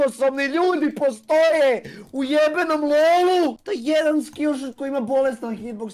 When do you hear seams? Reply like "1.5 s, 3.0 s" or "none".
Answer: 3.6 s